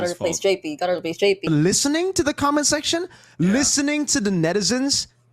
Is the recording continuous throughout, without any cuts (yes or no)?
no